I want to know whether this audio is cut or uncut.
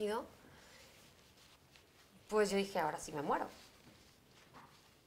uncut